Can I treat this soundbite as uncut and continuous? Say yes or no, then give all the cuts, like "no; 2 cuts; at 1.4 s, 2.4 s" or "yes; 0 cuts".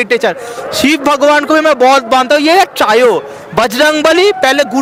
yes; 0 cuts